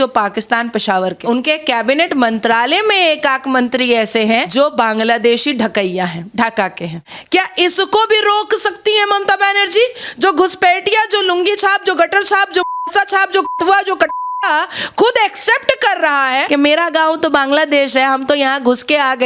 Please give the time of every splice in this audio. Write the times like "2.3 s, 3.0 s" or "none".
1.2 s, 4.5 s, 7.1 s